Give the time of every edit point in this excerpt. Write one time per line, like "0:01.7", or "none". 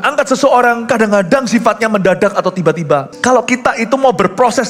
0:03.1